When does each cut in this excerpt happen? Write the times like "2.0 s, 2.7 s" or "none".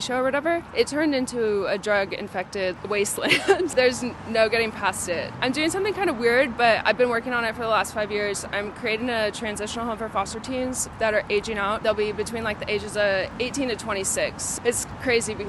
none